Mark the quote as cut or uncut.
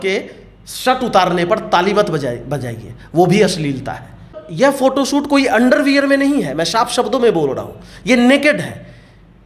cut